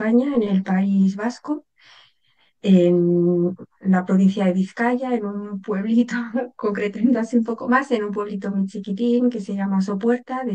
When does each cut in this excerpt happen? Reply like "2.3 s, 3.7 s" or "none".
none